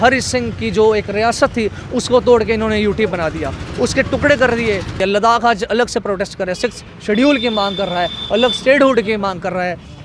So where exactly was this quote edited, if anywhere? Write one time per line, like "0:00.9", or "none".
0:05.0